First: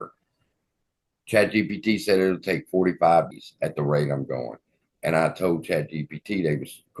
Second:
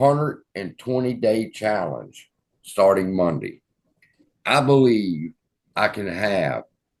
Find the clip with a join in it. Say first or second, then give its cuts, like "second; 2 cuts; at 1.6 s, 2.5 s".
first; 1 cut; at 3.3 s